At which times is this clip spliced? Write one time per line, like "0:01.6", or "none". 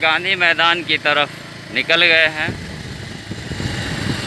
none